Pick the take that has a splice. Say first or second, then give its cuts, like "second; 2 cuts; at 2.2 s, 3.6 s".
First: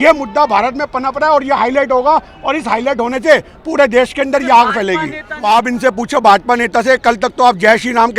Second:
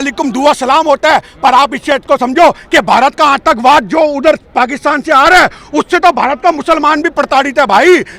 first; 1 cut; at 5.2 s